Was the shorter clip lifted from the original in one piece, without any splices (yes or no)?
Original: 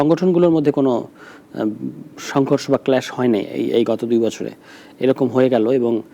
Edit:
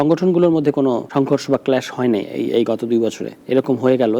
no